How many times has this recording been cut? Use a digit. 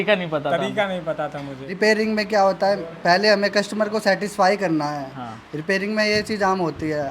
1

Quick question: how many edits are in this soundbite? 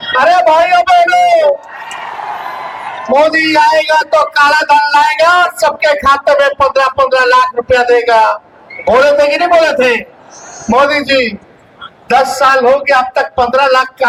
0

